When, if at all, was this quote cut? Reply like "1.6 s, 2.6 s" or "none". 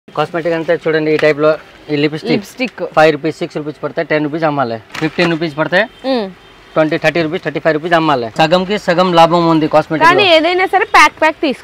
4.9 s, 8.3 s